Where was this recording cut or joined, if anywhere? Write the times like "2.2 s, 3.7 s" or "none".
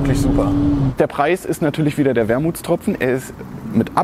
0.9 s